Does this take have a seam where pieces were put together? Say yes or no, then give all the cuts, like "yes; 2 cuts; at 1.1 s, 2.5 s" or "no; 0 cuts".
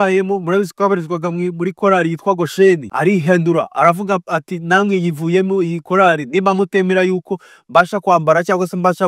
yes; 1 cut; at 2.9 s